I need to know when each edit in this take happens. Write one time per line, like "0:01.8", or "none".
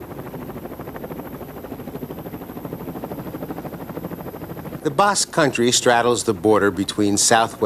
none